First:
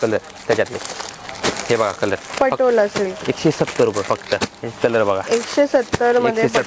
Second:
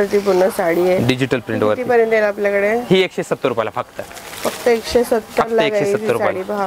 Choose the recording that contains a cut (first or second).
first